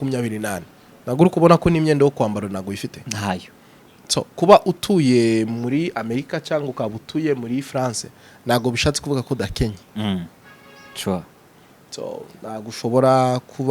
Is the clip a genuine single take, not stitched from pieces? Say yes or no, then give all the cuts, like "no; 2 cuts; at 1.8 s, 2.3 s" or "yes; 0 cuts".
yes; 0 cuts